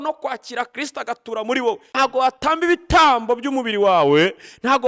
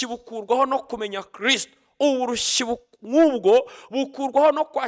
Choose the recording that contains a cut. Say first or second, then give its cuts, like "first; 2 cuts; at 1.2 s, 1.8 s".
first; 1 cut; at 1.9 s